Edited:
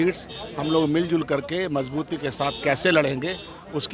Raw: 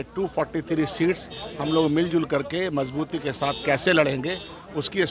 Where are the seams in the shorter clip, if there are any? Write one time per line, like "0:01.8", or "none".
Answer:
none